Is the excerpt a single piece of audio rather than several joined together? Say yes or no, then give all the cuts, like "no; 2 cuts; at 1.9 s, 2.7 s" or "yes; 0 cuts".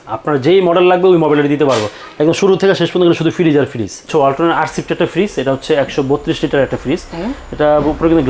no; 1 cut; at 4.1 s